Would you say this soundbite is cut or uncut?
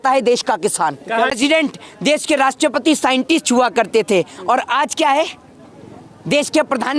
cut